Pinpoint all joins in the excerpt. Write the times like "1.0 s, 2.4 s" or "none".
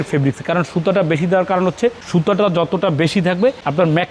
none